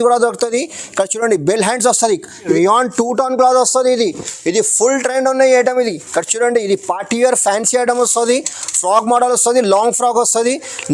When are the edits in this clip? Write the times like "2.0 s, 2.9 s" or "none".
2.5 s